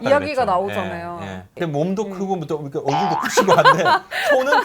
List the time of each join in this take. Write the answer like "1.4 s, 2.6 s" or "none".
1.5 s